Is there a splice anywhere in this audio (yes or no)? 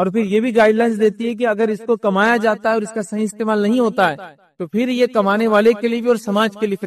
no